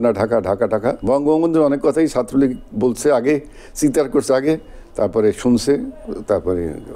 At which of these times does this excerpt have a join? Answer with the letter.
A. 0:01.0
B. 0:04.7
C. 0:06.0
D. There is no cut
A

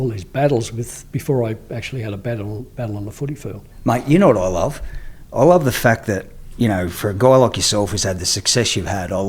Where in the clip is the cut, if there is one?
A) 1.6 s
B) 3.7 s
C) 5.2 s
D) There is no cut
B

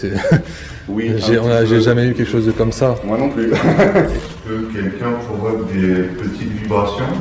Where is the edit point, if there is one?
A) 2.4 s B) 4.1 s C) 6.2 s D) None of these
B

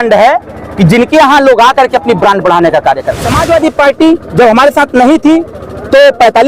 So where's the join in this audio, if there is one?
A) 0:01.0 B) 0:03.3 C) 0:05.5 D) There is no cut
B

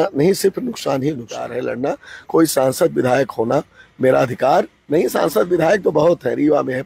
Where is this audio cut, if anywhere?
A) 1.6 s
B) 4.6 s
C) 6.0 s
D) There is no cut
A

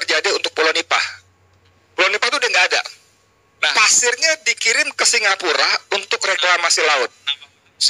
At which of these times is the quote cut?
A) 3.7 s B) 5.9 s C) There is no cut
A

